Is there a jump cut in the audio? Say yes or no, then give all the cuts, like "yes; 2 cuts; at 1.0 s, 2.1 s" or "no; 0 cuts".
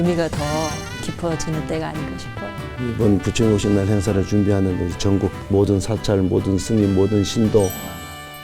no; 0 cuts